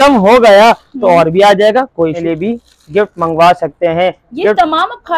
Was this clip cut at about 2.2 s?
yes; 1 cut; at 2.2 s

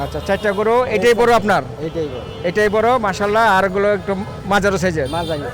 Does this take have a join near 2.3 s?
no; 0 cuts

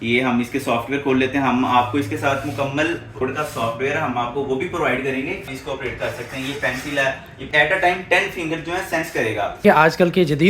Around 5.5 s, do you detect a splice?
yes; 4 cuts; at 3.2 s, 5.5 s, 7.4 s, 9.6 s

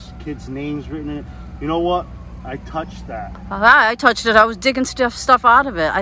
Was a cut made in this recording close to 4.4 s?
no; 0 cuts

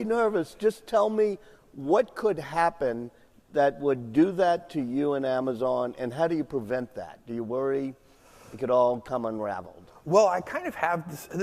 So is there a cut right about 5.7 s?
yes; 1 cut; at 5.7 s

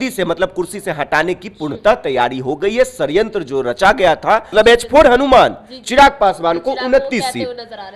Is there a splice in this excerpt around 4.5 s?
yes; 1 cut; at 4.5 s

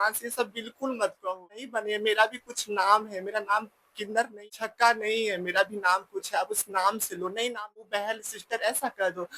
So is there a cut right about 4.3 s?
yes; 3 cuts; at 1.7 s, 4.3 s, 7.9 s

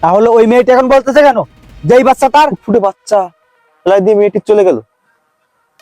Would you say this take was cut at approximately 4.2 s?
no; 1 cut; at 2.6 s

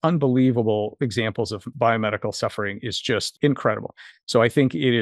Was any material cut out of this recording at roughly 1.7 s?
yes; 2 cuts; at 1.7 s, 3.3 s

